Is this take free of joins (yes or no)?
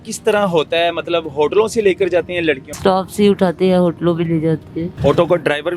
no